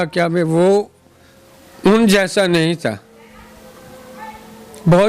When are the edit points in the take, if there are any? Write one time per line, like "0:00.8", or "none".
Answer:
none